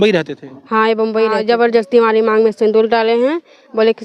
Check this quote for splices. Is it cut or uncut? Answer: cut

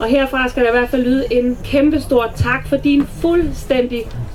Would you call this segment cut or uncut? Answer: cut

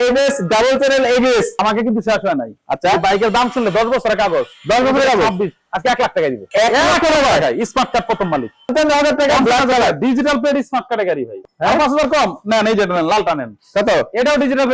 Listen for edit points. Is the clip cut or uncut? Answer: cut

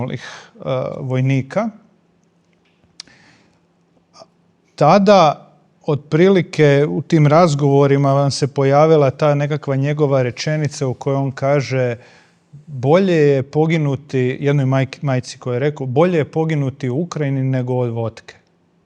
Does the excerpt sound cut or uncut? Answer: uncut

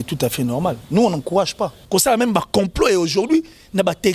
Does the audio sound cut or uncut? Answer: cut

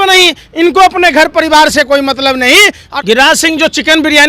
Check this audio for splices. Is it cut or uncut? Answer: cut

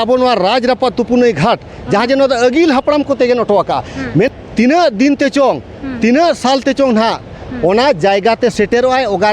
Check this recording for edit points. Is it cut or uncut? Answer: cut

